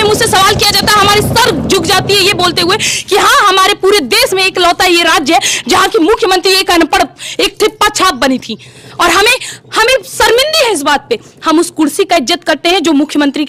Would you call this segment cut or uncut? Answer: uncut